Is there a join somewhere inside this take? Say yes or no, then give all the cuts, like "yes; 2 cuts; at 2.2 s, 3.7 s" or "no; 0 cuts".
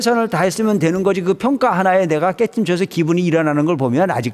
no; 0 cuts